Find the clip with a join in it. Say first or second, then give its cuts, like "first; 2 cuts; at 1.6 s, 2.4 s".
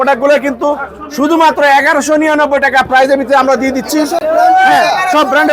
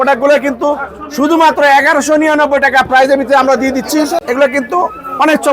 second; 1 cut; at 4.2 s